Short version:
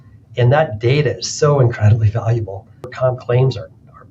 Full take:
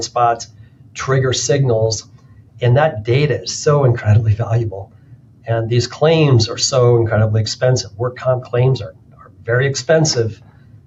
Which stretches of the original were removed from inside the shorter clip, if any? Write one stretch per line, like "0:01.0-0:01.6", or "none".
0:05.2-0:08.2